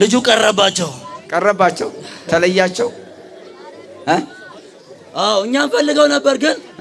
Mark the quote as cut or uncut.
uncut